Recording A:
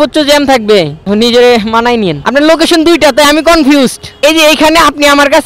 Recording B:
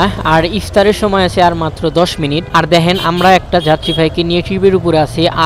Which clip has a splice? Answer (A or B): A